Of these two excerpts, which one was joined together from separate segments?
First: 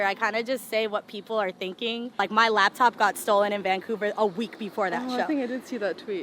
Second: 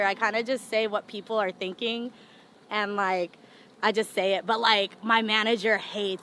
first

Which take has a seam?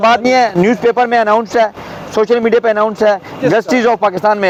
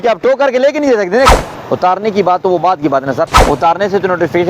second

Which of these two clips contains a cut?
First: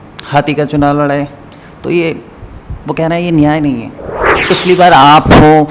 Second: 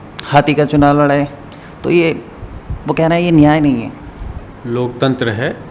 first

